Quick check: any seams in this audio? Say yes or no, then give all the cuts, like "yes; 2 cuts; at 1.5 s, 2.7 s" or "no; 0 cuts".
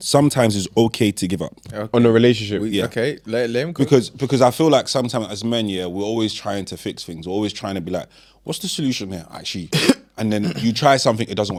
no; 0 cuts